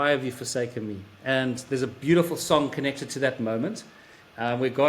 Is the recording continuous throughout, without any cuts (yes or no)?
yes